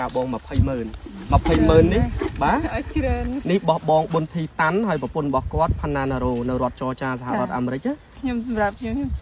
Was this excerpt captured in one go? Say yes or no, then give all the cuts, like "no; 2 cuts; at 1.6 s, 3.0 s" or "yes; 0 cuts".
no; 2 cuts; at 3.4 s, 8.1 s